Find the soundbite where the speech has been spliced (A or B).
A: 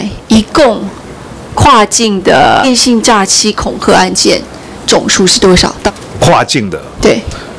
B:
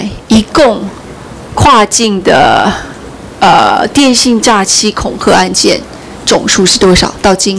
A